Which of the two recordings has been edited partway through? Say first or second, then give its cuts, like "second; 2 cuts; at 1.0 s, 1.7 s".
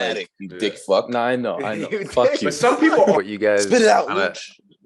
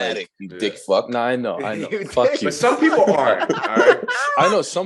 first; 1 cut; at 3.2 s